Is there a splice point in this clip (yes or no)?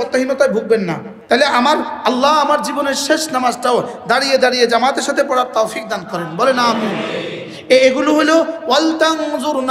yes